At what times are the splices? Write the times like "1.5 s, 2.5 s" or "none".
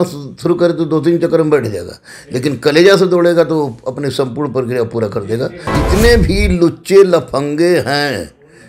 5.7 s